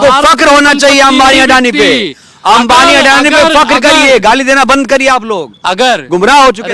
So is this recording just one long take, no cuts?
yes; 0 cuts

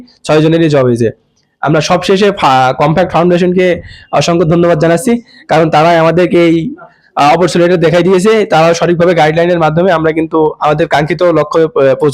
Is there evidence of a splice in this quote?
no; 0 cuts

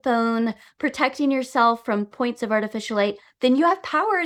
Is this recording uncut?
yes; 0 cuts

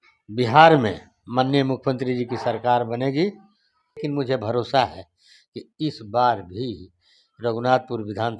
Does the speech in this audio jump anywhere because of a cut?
yes; 1 cut; at 4.0 s

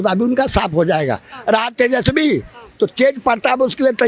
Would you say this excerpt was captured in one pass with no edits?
yes; 0 cuts

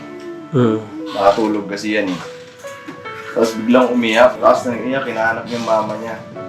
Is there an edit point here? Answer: yes; 1 cut; at 4.4 s

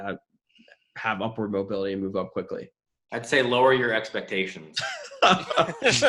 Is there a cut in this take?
no; 0 cuts

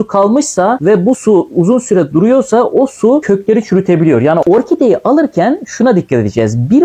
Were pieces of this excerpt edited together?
yes; 1 cut; at 4.4 s

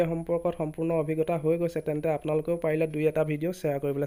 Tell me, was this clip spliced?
no; 0 cuts

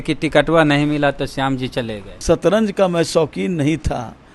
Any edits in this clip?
yes; 1 cut; at 2.1 s

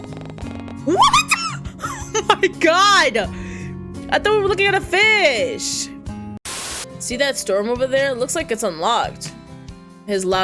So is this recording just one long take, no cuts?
no; 1 cut; at 6.4 s

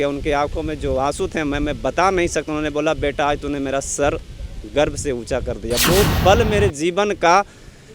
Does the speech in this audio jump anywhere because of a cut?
no; 0 cuts

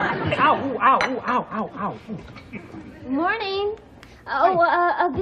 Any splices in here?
yes; 1 cut; at 1.7 s

